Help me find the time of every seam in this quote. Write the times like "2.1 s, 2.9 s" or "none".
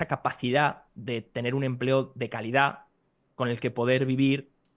none